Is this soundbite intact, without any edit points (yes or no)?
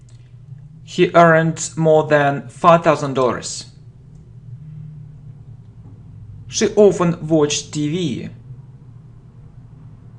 no